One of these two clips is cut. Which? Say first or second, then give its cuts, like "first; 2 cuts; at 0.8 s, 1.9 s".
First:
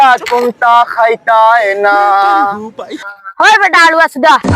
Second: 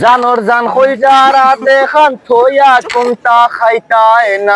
first; 1 cut; at 3.1 s